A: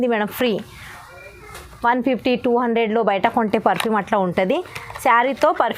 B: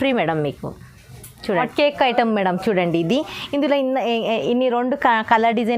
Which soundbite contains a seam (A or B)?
B